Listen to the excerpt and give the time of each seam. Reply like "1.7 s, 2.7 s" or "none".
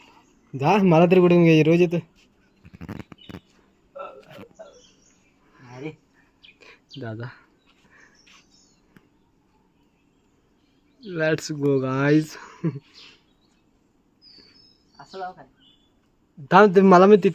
6.9 s